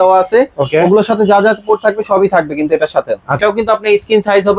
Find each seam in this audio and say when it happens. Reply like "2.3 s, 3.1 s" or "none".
3.4 s